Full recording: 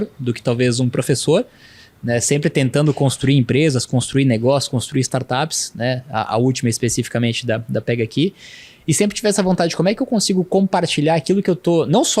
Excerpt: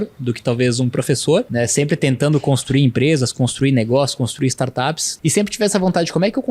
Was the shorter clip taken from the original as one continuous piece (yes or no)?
no